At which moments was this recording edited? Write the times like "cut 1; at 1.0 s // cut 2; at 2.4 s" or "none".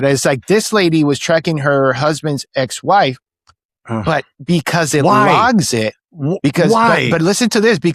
none